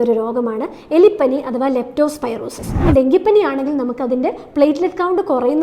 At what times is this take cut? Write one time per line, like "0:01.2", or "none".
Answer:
0:02.8